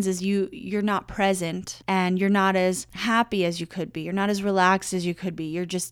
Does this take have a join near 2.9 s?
yes; 2 cuts; at 1.7 s, 2.9 s

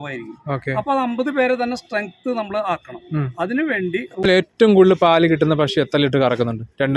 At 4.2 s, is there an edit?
yes; 1 cut; at 4.2 s

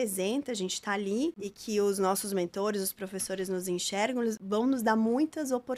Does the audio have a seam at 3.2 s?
no; 2 cuts; at 1.5 s, 4.4 s

